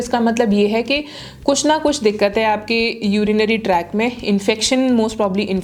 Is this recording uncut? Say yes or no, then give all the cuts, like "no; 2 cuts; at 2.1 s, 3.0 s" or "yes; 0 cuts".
yes; 0 cuts